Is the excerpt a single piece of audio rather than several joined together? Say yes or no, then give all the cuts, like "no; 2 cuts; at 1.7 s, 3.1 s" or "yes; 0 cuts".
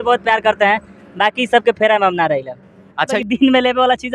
no; 1 cut; at 3.2 s